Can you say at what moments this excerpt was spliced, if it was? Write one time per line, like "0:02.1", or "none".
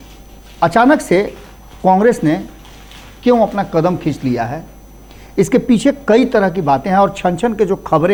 none